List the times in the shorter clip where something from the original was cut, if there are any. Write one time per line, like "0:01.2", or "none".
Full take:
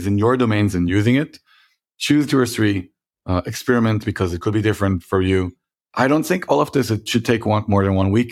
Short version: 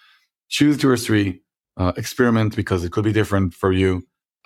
none